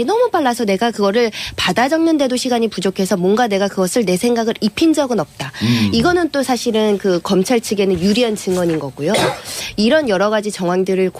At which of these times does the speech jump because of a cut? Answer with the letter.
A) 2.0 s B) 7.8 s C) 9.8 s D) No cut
A